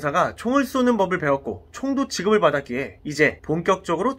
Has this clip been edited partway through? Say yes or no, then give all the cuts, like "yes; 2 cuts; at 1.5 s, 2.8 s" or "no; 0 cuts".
yes; 1 cut; at 3.2 s